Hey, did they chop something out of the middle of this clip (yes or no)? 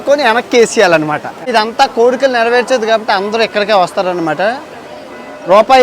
yes